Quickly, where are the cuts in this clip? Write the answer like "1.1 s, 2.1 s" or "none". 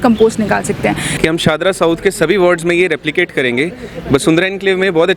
1.1 s